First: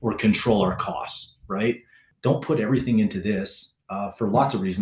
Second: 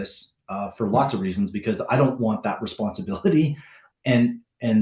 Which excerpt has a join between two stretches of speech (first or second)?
first